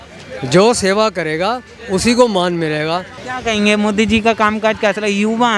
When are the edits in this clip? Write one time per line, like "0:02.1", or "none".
0:03.2